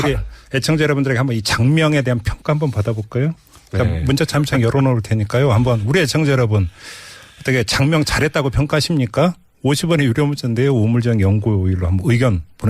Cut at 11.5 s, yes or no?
no